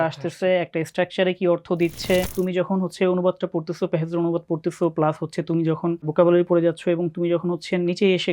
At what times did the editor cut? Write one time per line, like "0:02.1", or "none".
0:02.3
0:06.1